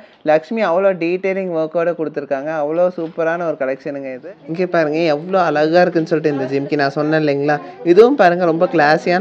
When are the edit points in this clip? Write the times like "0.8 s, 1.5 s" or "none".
4.1 s